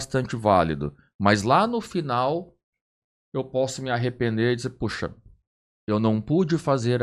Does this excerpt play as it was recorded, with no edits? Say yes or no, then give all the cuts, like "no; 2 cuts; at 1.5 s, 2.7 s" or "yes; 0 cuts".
yes; 0 cuts